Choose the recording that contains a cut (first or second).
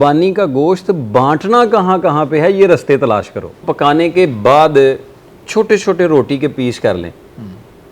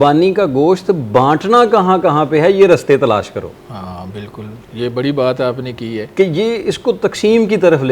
first